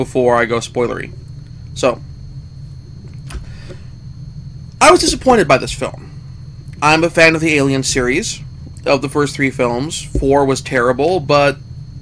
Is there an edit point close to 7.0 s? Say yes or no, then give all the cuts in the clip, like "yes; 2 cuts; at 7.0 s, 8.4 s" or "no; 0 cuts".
no; 1 cut; at 4.8 s